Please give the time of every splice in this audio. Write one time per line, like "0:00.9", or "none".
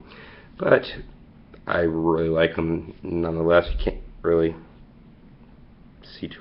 0:01.9